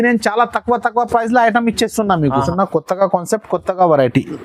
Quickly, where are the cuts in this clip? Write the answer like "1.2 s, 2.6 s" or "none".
2.5 s

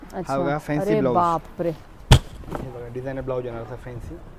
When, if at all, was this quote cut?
none

